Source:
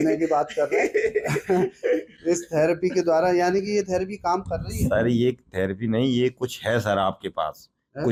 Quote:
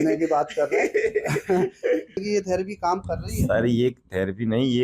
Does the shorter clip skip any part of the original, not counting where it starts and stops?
yes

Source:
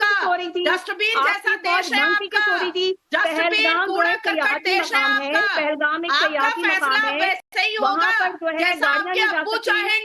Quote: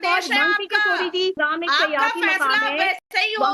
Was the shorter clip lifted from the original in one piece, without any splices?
no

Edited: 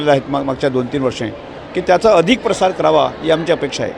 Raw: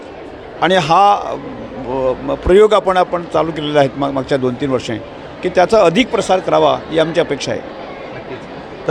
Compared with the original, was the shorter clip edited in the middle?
no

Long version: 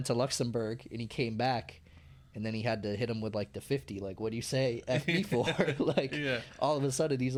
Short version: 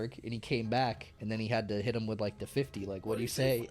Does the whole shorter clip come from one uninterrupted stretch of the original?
no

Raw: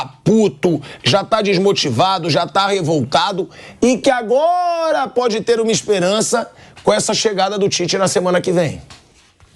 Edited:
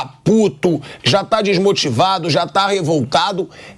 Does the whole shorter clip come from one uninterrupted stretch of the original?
yes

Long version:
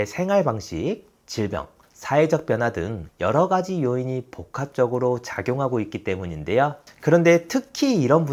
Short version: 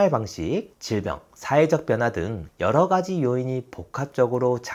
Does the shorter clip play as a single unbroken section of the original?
no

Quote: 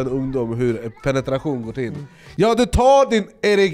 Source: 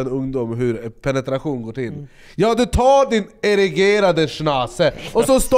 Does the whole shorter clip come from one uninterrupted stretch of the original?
yes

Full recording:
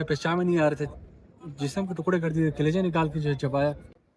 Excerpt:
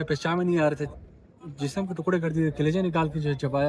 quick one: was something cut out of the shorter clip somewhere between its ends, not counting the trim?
no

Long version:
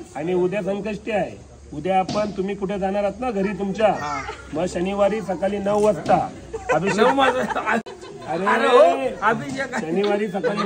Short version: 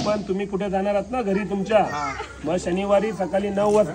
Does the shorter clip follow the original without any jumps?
yes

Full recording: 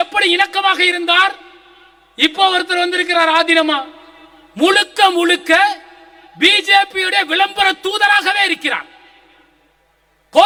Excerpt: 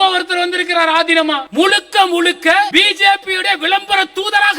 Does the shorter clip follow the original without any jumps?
no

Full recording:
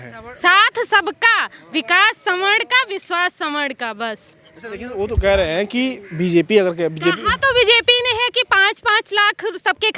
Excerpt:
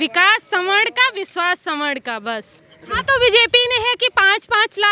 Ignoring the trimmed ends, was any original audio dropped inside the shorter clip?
yes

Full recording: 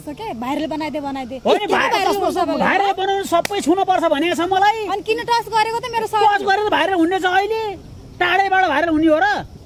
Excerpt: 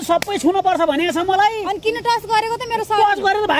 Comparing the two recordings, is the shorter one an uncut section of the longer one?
yes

